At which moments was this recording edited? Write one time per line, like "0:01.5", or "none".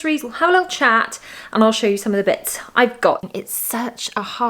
0:03.2